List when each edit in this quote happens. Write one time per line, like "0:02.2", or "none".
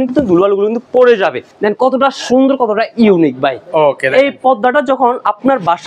0:01.5